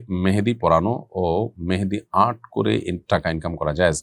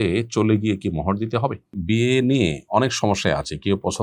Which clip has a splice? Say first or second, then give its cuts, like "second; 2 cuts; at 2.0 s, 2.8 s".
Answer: second; 1 cut; at 1.6 s